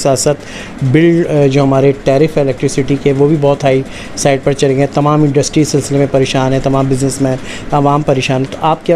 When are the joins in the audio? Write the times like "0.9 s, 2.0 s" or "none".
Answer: none